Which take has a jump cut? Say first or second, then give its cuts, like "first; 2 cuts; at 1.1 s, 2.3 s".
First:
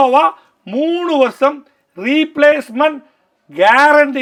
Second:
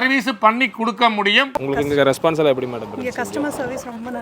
second; 1 cut; at 1.5 s